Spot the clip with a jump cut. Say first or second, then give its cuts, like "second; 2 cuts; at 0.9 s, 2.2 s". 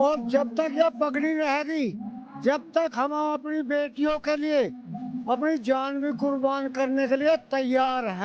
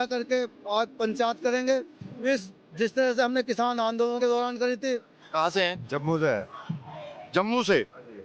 second; 1 cut; at 5.2 s